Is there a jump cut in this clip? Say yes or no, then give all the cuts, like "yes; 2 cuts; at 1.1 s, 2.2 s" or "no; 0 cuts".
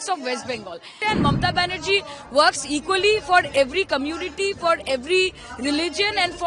yes; 1 cut; at 0.9 s